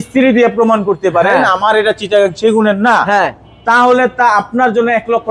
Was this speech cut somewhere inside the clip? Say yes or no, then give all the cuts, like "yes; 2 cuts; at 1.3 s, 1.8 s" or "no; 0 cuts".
no; 0 cuts